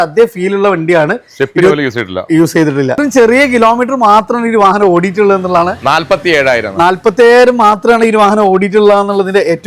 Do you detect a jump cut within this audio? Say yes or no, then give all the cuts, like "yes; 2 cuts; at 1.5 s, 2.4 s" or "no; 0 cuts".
yes; 1 cut; at 3.0 s